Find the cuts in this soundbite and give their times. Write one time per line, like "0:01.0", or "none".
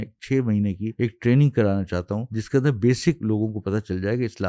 0:00.9
0:02.3
0:03.2